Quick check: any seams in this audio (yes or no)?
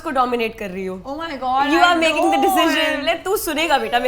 no